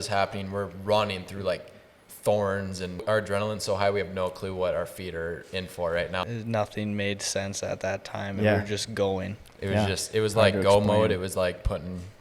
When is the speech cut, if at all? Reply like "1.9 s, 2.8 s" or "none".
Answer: 3.0 s, 6.2 s

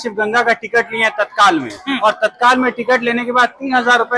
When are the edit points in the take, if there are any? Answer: none

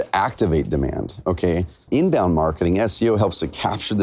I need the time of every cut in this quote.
1.9 s

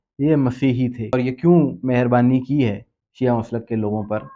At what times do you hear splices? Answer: 1.1 s

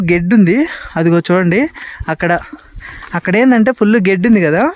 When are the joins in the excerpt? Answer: none

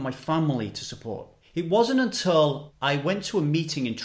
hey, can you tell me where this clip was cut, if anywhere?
1.3 s, 2.7 s

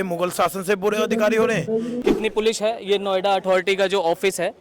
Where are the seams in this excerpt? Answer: 2.1 s

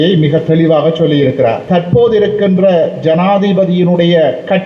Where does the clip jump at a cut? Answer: 1.6 s

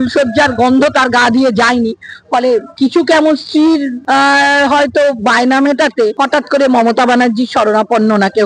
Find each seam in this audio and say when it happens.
2.7 s, 3.9 s, 6.1 s

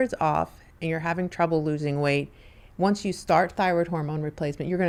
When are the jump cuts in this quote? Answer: none

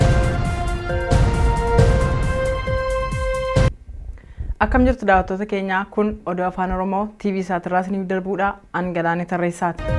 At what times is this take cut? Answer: none

